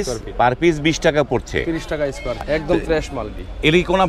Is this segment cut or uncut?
cut